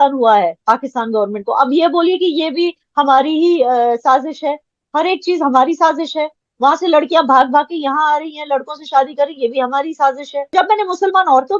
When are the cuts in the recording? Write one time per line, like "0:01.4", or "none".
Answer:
0:10.5